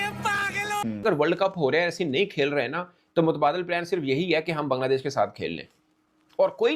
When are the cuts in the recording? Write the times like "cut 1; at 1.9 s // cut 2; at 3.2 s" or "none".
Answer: cut 1; at 0.9 s